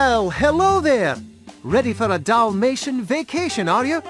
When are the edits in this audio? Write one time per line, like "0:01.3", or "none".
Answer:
none